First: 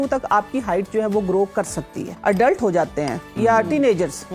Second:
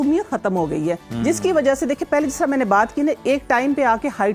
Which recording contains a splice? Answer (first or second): first